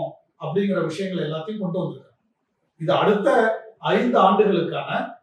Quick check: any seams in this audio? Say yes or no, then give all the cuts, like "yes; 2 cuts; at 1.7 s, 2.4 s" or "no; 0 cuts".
no; 0 cuts